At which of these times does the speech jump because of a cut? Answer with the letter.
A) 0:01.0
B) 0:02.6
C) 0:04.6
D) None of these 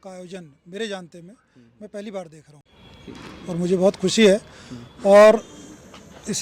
D